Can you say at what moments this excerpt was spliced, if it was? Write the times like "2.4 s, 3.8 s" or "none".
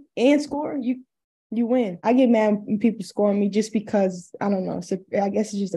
1.9 s

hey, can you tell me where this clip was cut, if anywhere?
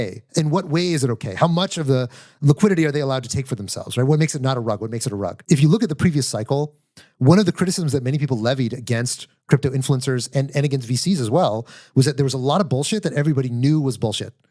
5.4 s

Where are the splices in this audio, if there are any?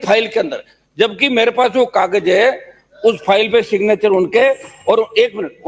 none

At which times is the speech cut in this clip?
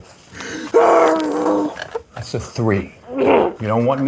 none

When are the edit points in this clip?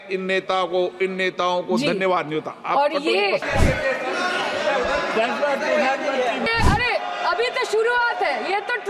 3.4 s, 6.5 s

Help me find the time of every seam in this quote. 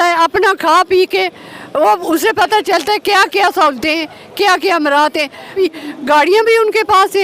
5.5 s

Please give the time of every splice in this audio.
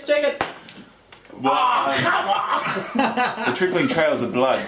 3.5 s

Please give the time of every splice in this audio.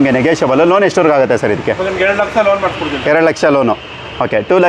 none

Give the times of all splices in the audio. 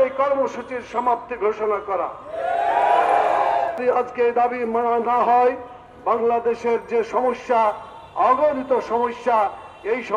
3.8 s

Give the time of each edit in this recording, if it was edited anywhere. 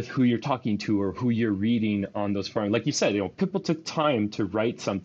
none

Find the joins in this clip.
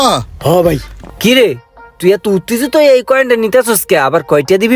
0.9 s

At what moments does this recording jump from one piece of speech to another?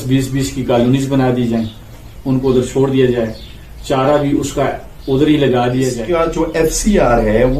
6.0 s

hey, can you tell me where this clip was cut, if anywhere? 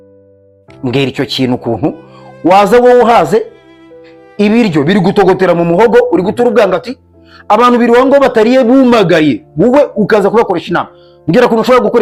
none

